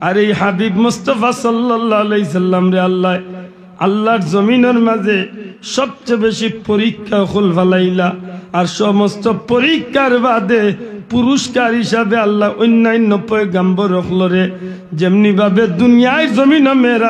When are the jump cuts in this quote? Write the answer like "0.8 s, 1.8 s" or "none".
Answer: none